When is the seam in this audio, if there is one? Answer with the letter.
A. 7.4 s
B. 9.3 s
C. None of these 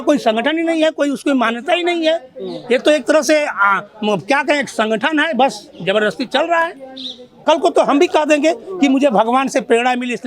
A